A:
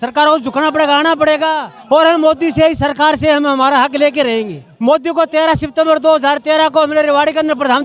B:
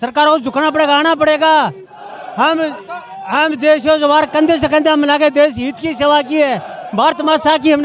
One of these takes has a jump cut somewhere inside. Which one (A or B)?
A